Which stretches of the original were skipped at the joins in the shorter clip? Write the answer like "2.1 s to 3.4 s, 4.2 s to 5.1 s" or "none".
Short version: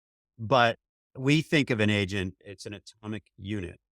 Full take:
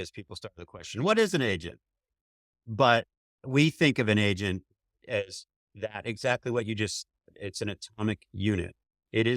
4.8 s to 7.4 s